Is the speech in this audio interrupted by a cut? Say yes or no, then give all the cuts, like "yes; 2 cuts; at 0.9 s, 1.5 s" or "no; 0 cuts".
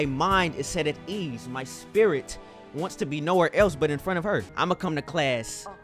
yes; 1 cut; at 4.5 s